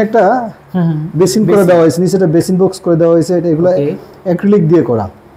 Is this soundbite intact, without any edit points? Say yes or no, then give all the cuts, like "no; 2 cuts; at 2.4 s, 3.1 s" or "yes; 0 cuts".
yes; 0 cuts